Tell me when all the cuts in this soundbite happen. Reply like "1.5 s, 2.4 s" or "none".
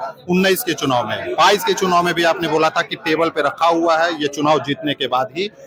none